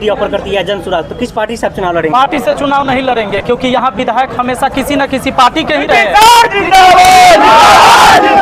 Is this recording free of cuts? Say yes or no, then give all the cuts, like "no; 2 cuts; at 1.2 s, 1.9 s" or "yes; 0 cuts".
yes; 0 cuts